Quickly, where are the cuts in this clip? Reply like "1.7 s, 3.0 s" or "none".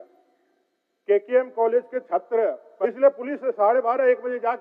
2.7 s